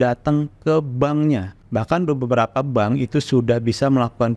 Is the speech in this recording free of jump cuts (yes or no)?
no